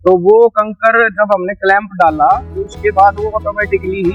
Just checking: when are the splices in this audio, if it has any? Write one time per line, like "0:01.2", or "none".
none